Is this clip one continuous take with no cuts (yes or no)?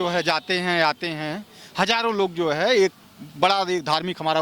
yes